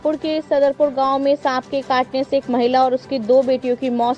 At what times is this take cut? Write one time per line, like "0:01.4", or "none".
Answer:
none